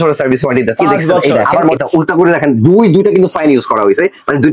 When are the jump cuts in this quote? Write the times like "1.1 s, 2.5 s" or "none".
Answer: 1.7 s